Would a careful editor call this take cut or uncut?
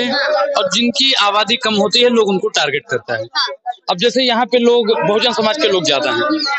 uncut